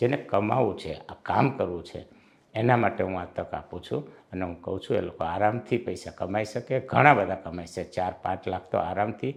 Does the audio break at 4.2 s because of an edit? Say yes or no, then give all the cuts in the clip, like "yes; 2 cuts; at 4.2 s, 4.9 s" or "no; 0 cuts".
no; 0 cuts